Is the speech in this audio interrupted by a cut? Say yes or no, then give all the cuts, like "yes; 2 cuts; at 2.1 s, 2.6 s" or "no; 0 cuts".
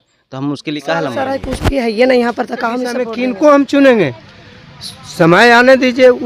yes; 1 cut; at 3.1 s